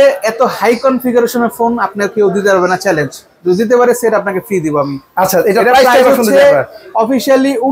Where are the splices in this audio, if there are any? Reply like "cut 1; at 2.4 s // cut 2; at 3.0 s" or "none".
none